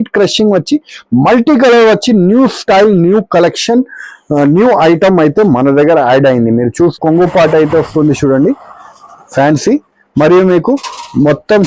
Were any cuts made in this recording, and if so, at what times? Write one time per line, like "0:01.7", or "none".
0:07.0